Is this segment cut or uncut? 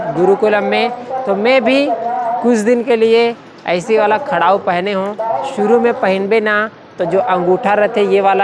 uncut